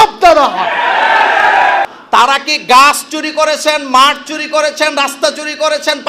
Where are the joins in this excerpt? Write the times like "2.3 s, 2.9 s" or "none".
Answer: 1.9 s